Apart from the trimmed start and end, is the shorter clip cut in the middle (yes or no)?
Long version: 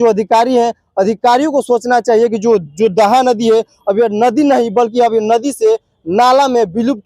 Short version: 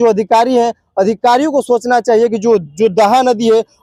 no